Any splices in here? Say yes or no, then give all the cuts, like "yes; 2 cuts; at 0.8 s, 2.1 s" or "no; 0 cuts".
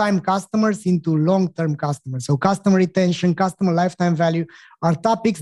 no; 0 cuts